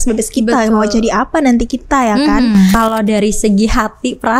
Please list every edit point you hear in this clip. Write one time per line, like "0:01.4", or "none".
0:02.8